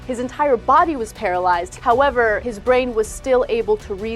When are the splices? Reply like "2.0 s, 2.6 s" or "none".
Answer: 1.7 s, 2.5 s